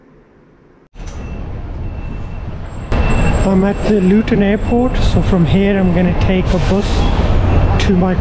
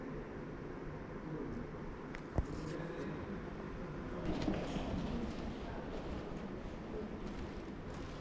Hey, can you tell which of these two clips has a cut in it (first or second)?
first